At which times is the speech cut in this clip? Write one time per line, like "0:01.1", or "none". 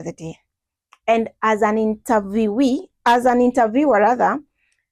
none